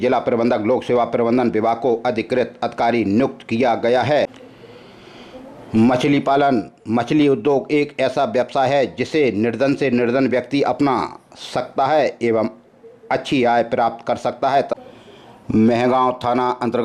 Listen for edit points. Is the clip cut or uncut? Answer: cut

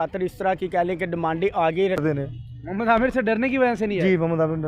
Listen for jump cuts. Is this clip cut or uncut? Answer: cut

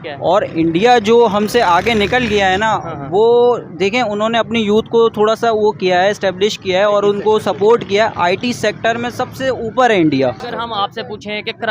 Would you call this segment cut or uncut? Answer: cut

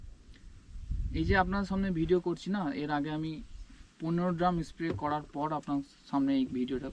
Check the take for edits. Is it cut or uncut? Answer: uncut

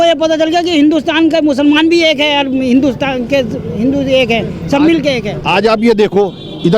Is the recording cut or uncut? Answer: uncut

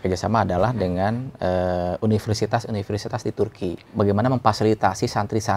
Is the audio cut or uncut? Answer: cut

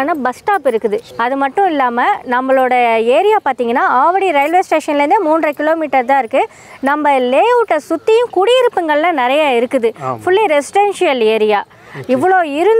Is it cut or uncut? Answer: cut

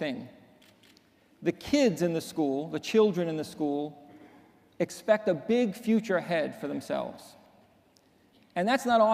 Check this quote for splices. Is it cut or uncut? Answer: uncut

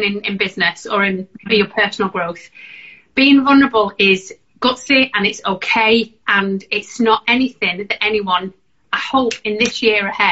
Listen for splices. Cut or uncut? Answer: uncut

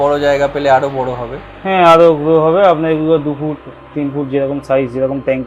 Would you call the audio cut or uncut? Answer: uncut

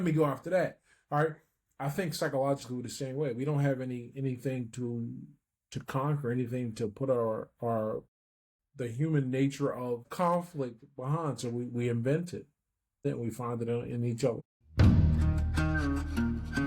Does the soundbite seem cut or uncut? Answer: cut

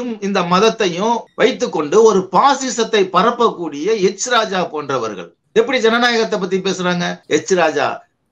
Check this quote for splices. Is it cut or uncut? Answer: cut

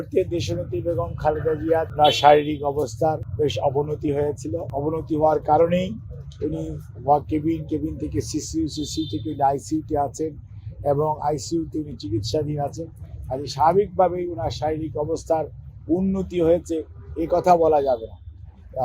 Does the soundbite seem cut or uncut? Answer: cut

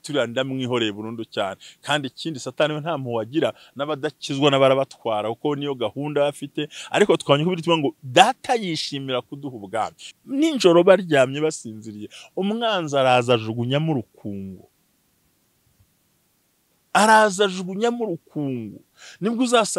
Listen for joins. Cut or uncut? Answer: cut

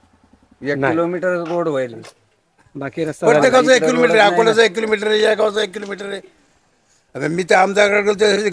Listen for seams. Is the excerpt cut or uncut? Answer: uncut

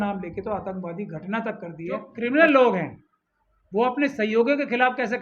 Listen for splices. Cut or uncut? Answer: cut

